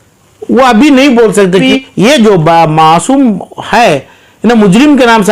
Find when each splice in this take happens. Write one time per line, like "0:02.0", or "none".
0:01.7